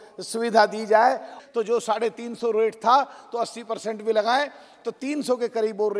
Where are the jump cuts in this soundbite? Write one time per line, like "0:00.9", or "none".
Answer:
0:01.4